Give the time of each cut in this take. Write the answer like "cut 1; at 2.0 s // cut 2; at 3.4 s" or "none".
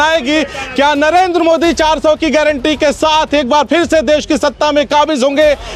none